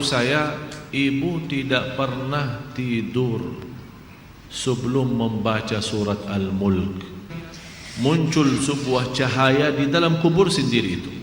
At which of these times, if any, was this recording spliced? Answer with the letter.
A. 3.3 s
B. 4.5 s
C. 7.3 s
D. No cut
C